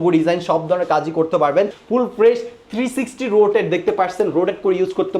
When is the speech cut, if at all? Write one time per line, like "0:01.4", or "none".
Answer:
0:01.8